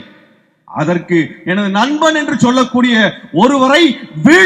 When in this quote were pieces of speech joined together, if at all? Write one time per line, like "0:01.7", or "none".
none